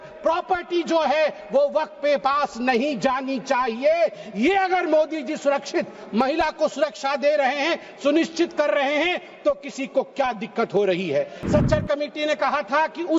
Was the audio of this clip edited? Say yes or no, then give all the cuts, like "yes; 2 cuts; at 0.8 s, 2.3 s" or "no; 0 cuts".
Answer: yes; 1 cut; at 11.4 s